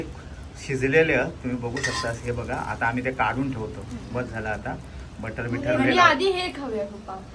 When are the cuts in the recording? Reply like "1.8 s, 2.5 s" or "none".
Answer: none